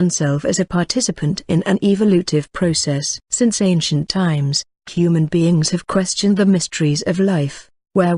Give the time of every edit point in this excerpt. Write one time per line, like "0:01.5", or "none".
0:02.5